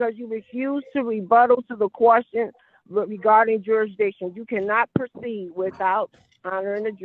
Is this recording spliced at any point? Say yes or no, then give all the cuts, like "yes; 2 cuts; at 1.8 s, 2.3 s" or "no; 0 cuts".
no; 0 cuts